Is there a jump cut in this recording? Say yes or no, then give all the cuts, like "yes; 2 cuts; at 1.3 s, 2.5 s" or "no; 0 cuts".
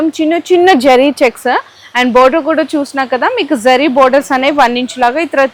no; 0 cuts